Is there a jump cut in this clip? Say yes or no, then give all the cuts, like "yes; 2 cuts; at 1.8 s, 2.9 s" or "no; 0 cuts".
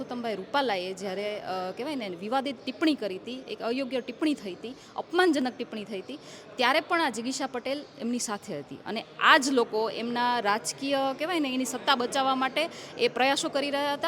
no; 0 cuts